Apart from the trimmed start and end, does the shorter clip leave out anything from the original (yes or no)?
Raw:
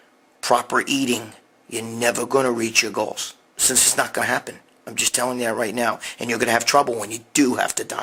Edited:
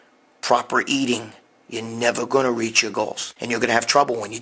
yes